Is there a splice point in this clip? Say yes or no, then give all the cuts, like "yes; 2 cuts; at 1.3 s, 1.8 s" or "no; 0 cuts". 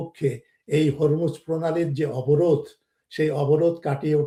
no; 0 cuts